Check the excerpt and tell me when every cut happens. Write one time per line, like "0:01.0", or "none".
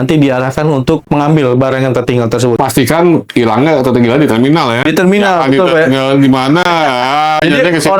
0:01.0
0:02.6

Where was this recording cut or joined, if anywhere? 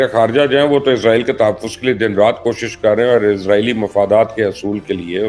none

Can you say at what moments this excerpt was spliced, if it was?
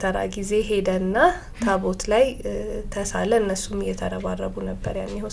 none

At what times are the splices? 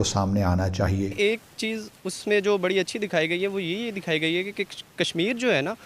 0:01.1

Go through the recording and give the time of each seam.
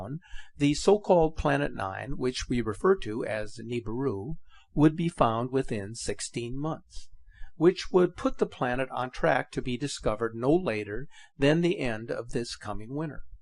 none

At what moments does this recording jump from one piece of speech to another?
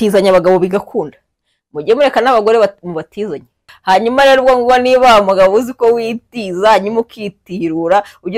0:03.7

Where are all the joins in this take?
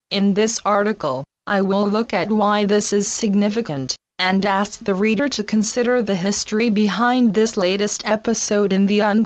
0:02.4

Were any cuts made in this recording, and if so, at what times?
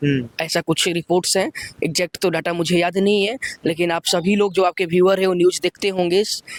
none

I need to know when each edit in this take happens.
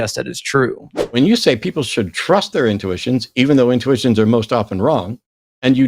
0:01.0

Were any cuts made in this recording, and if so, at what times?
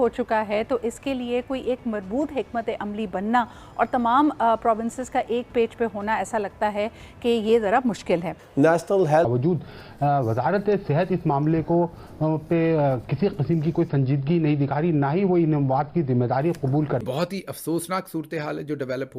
0:09.3
0:17.0

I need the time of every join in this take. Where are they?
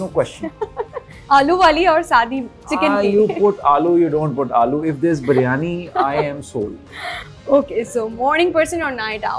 none

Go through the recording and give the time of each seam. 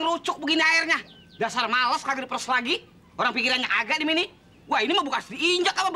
none

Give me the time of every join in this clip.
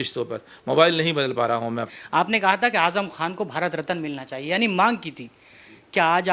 0:01.9

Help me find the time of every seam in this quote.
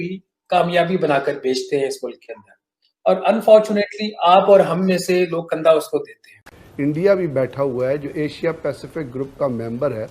0:06.6

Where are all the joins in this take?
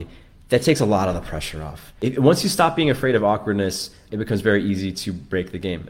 0:01.9
0:04.0

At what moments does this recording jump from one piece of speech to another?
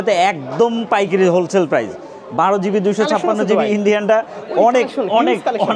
none

